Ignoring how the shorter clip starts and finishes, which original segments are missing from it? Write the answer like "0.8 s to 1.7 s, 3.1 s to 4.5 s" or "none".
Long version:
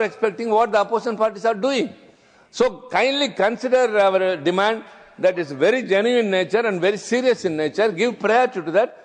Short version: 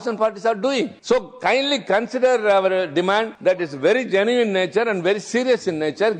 2.0 s to 2.5 s, 4.8 s to 5.1 s

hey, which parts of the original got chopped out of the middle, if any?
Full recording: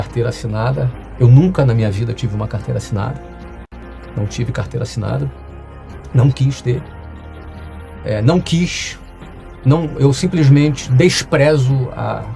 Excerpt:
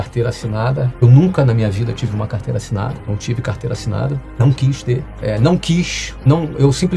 0.9 s to 1.1 s, 3.2 s to 4.1 s, 5.5 s to 6.2 s, 6.9 s to 7.9 s, 8.9 s to 9.5 s

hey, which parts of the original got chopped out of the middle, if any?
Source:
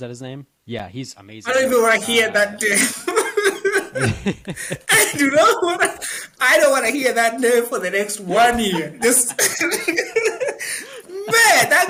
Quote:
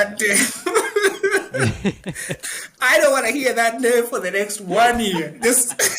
4.8 s to 6.0 s

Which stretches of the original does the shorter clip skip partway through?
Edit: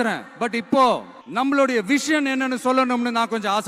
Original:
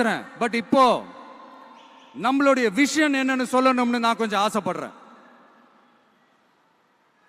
1.2 s to 2.0 s

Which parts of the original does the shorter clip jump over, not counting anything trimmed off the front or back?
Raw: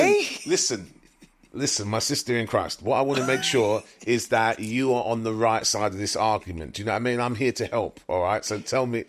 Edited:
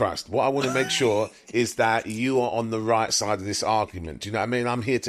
none

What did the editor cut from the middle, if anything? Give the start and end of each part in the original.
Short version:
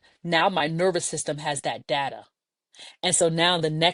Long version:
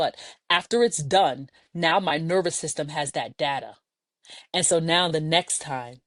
none

